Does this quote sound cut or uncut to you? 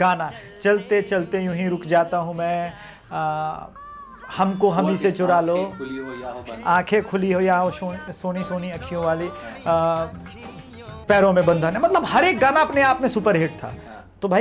uncut